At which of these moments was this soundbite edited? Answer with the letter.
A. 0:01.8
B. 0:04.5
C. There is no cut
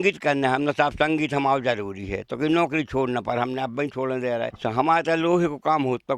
B